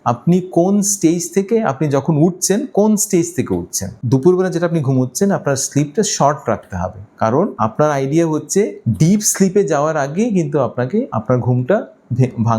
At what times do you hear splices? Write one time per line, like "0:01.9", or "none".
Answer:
0:03.9